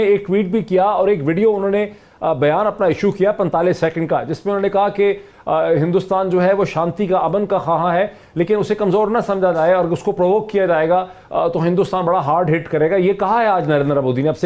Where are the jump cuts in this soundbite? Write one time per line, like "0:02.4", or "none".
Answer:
none